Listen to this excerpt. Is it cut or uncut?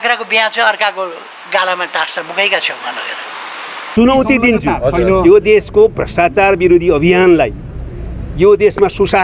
cut